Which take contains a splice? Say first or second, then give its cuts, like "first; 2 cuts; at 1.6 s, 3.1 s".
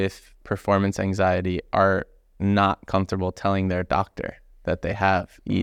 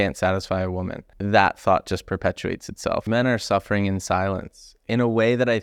second; 2 cuts; at 1.1 s, 3.0 s